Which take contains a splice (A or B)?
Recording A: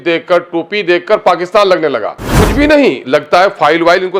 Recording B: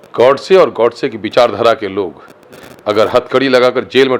A